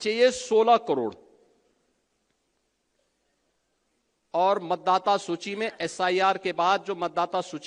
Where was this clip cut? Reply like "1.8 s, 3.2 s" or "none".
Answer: none